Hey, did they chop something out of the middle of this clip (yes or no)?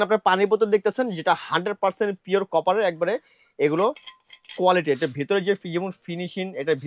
no